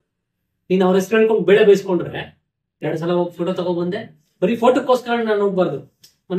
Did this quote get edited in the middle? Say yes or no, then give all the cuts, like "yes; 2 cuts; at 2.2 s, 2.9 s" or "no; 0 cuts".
yes; 1 cut; at 2.8 s